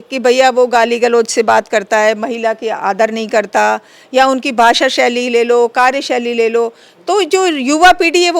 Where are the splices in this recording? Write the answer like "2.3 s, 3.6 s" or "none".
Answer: none